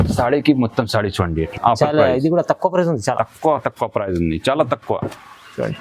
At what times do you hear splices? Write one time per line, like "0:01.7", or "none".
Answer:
0:01.5